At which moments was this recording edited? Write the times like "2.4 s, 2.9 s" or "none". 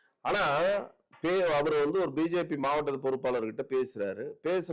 none